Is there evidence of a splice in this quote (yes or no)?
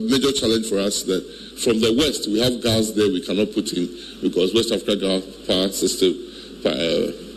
no